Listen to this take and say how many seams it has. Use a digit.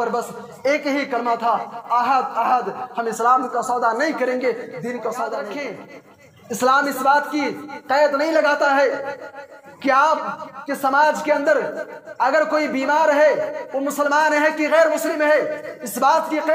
1